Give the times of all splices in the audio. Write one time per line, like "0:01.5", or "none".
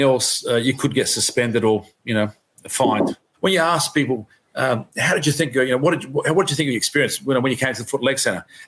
0:03.3